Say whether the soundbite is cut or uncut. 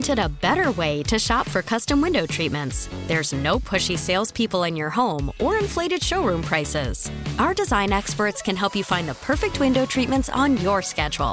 uncut